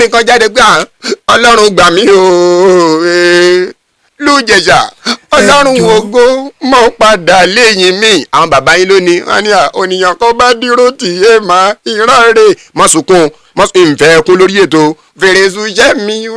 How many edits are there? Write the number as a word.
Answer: zero